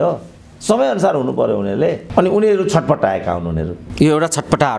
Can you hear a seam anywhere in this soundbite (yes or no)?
no